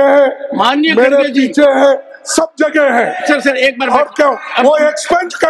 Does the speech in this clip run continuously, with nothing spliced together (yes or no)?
yes